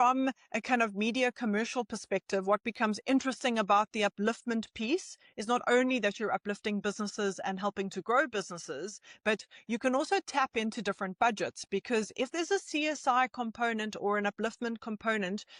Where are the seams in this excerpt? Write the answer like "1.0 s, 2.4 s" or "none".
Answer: none